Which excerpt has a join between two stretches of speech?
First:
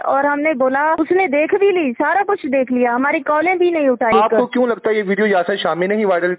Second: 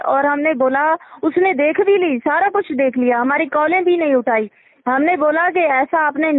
first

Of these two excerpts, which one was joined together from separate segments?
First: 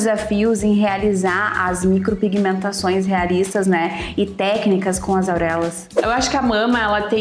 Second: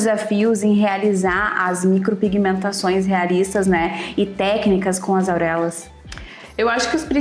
first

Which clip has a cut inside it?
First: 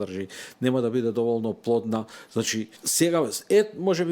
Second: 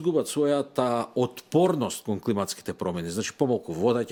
first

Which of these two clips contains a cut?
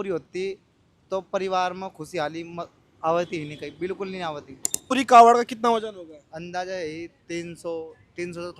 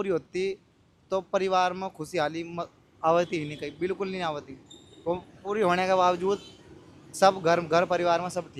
first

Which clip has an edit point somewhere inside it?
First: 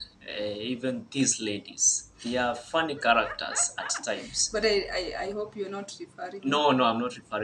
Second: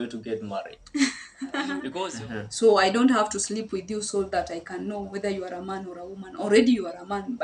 second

